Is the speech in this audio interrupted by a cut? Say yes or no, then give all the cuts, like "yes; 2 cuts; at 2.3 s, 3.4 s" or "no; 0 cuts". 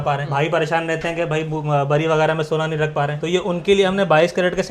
no; 0 cuts